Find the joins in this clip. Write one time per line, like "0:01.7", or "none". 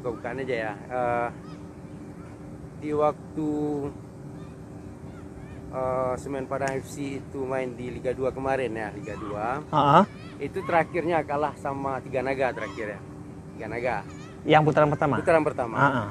none